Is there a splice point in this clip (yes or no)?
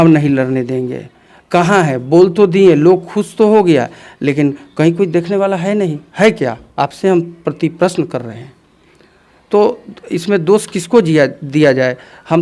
no